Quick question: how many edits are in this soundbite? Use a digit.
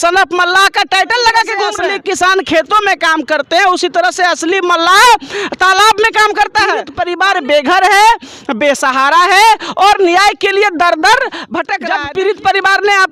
3